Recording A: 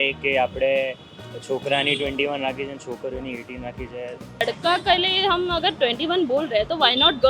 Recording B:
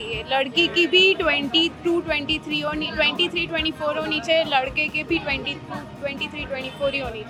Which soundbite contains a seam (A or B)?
A